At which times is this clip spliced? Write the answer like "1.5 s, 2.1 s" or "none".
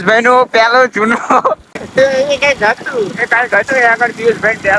1.8 s